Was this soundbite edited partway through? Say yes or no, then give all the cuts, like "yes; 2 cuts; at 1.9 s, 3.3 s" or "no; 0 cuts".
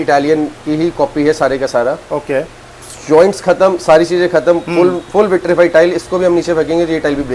no; 0 cuts